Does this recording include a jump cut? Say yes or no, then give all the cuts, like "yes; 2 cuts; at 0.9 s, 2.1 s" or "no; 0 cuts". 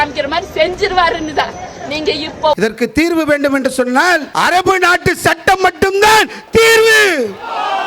yes; 2 cuts; at 2.6 s, 4.3 s